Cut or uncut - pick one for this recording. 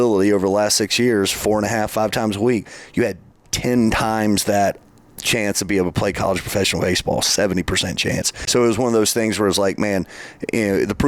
uncut